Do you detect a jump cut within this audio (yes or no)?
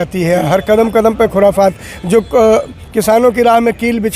no